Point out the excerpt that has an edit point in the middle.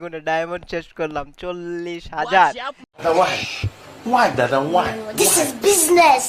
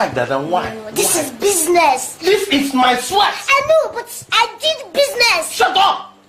first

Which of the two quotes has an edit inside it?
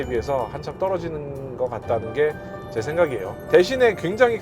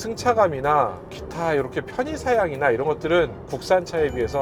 first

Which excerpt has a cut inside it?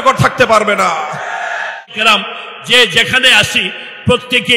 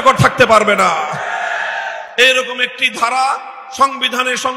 first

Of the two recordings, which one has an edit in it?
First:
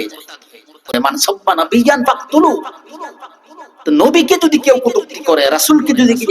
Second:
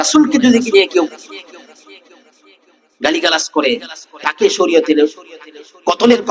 first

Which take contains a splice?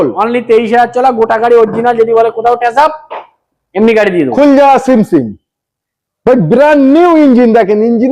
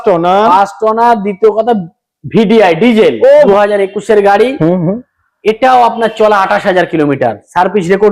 second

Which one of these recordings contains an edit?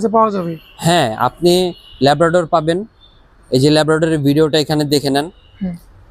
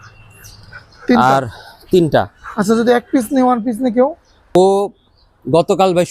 second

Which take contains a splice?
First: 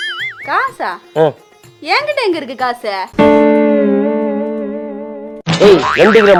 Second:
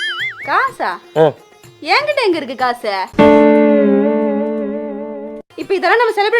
second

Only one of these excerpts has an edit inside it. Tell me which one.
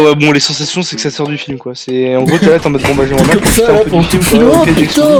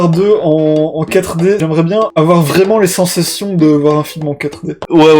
second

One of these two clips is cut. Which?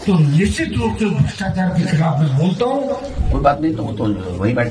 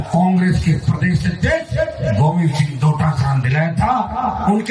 first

